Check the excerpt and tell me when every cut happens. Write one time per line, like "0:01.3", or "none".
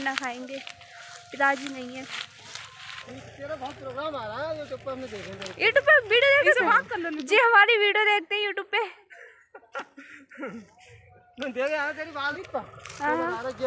0:03.0
0:12.4